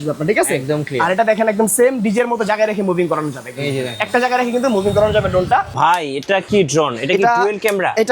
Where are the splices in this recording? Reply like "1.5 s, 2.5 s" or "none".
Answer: 5.7 s